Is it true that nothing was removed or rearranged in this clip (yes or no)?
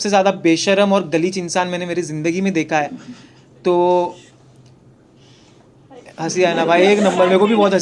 yes